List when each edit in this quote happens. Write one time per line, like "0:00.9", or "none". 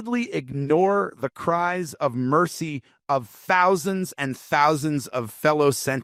none